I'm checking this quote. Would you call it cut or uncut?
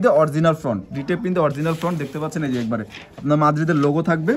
uncut